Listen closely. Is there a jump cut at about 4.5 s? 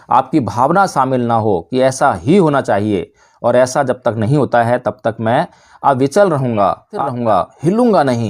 no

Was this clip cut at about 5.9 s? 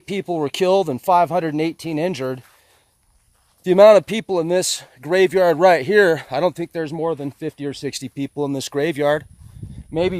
no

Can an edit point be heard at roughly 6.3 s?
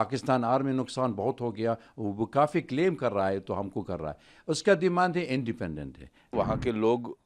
yes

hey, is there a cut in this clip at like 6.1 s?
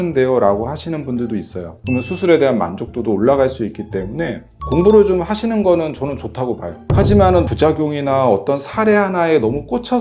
no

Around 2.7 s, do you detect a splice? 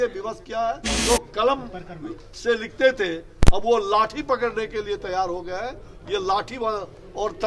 no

